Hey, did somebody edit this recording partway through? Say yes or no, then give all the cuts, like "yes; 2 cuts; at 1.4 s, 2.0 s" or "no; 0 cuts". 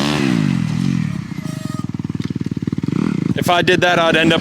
yes; 1 cut; at 3.3 s